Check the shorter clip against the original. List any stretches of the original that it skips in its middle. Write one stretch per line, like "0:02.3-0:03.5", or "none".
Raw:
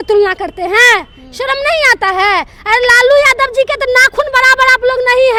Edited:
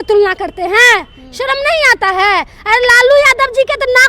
none